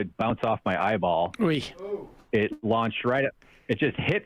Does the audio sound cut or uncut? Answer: uncut